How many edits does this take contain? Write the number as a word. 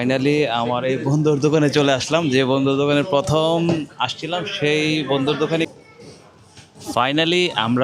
one